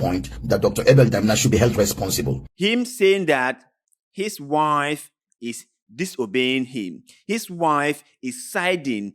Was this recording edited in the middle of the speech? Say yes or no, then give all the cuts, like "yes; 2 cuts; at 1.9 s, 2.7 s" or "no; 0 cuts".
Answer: yes; 1 cut; at 2.4 s